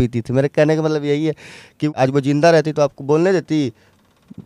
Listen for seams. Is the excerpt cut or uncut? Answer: cut